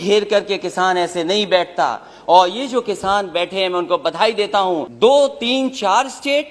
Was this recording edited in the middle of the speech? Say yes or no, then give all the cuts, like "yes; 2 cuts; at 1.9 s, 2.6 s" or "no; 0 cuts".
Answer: yes; 1 cut; at 4.9 s